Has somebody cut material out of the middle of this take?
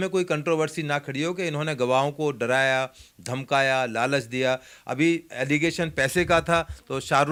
no; 0 cuts

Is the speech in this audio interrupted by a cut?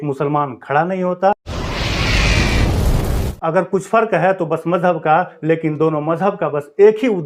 yes; 2 cuts; at 1.5 s, 3.3 s

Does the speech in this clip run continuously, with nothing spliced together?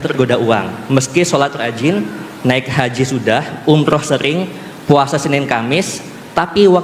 yes; 0 cuts

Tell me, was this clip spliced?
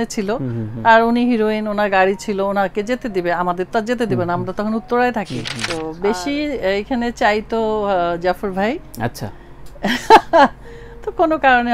yes; 1 cut; at 5.6 s

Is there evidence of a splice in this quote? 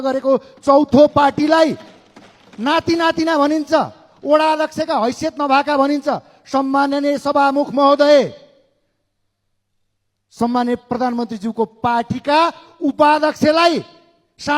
no; 0 cuts

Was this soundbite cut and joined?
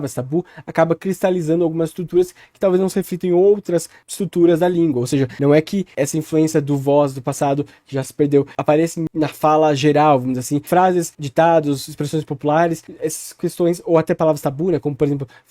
yes; 2 cuts; at 5.3 s, 10.6 s

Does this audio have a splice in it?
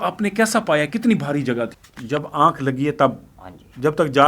yes; 1 cut; at 1.9 s

